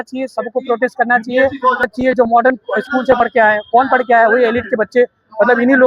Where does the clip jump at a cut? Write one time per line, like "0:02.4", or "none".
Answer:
0:01.9